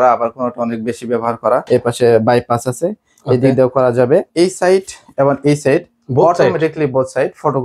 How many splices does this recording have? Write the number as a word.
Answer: two